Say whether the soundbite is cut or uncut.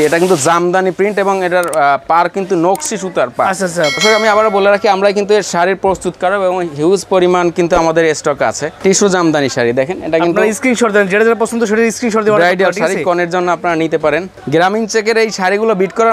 cut